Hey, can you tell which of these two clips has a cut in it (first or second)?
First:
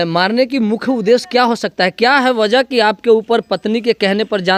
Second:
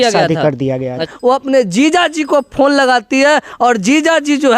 second